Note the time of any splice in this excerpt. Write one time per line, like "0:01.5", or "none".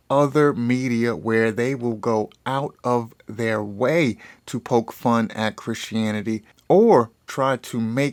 none